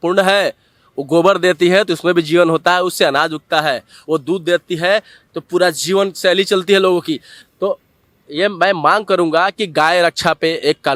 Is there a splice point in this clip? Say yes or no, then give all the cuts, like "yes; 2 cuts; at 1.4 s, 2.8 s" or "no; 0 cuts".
no; 0 cuts